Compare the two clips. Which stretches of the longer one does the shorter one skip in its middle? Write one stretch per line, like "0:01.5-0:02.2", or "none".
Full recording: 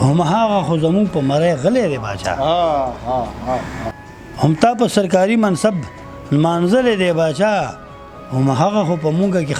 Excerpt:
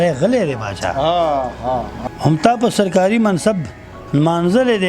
0:03.4-0:04.1